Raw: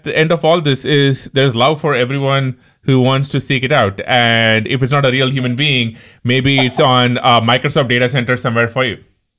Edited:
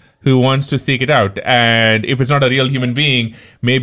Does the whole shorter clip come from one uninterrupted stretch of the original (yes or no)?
yes